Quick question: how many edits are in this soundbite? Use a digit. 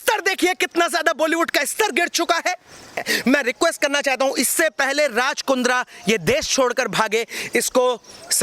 1